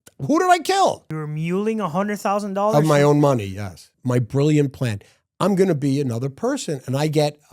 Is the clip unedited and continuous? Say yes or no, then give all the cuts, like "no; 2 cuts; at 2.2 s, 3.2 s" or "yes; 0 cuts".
no; 2 cuts; at 1.0 s, 3.9 s